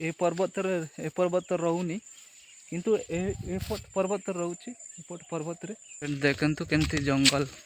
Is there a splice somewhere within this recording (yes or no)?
yes